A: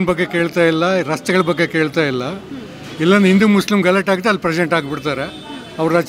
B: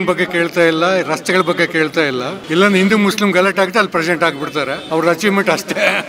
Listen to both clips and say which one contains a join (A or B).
B